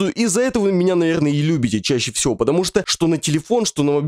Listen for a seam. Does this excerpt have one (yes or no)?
yes